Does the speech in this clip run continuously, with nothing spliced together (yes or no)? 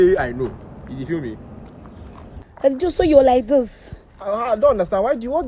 no